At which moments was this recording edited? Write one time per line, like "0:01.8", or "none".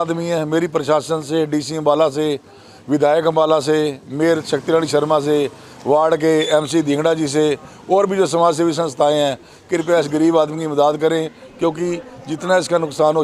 none